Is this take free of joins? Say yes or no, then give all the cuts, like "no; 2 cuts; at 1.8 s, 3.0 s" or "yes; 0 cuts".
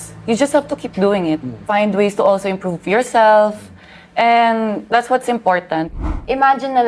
no; 2 cuts; at 1.6 s, 5.9 s